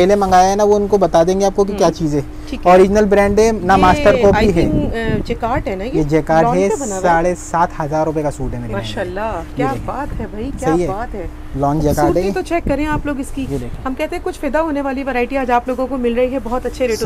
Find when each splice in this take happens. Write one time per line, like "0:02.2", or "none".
none